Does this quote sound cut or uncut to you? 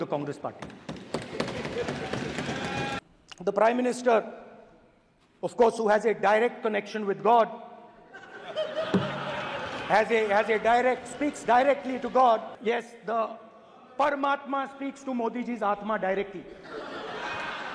cut